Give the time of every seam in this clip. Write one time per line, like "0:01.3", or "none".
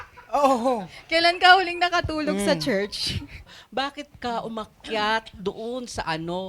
0:03.6

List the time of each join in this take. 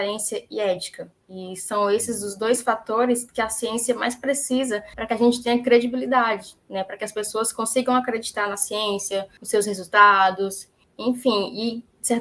0:04.9
0:09.4

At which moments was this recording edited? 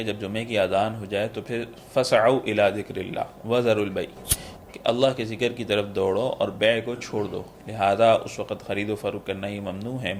none

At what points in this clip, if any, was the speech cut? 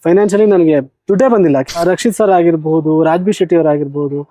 0:01.7

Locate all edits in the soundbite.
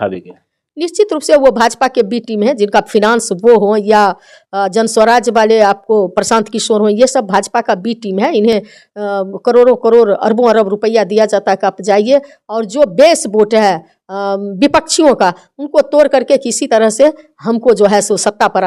none

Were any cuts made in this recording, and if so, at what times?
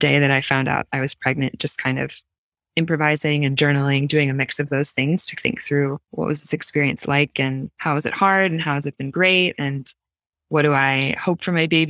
0:06.0

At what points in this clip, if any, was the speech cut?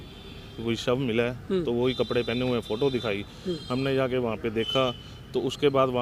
none

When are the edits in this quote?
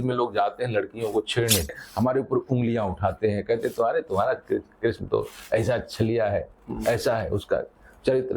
0:01.7

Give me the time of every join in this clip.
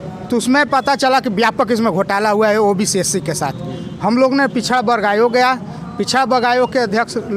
none

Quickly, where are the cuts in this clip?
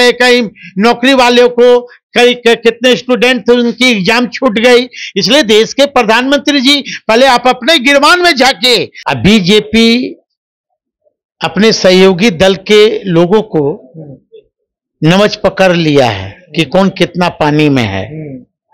0:09.0

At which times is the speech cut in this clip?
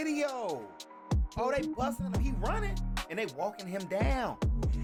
none

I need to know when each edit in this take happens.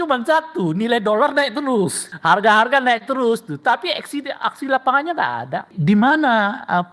0:02.0
0:05.7

